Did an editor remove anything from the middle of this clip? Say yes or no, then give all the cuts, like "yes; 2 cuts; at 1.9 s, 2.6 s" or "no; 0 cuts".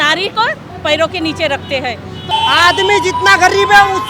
yes; 1 cut; at 2.3 s